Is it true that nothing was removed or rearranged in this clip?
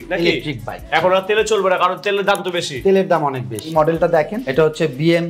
no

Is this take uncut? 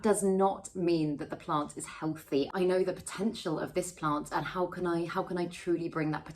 no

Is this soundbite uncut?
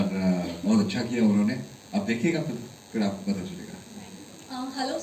yes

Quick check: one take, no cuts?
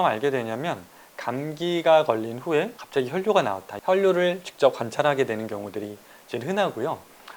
yes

